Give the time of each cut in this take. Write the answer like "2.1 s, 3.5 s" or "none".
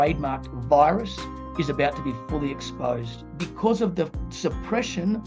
3.2 s